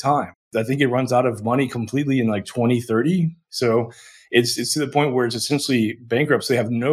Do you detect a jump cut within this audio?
no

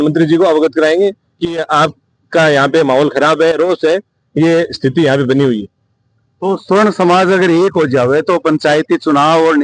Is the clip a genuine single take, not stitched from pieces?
yes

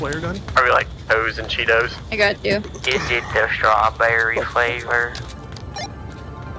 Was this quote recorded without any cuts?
yes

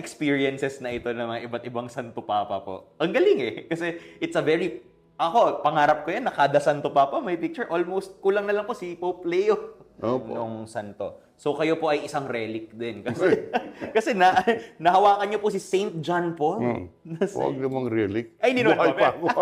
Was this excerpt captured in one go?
no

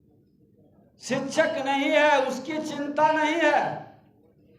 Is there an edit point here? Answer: no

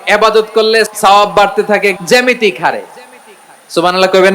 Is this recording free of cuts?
no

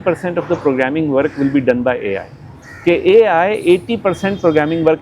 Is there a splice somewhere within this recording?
no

